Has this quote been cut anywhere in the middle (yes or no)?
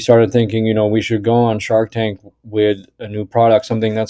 no